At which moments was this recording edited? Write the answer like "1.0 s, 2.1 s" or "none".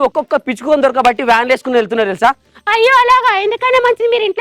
none